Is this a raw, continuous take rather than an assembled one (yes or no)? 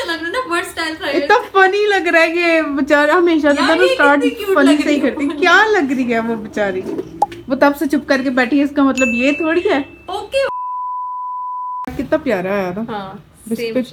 yes